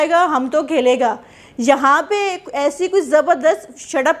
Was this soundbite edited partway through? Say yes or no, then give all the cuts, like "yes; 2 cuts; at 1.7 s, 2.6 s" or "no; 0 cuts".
no; 0 cuts